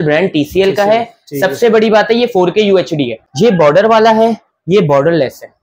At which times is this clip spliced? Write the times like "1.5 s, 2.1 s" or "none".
3.2 s